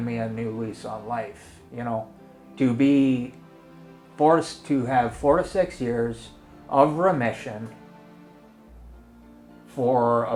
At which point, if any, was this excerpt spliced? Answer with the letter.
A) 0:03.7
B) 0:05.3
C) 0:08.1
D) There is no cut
D